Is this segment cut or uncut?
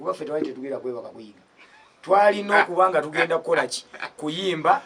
uncut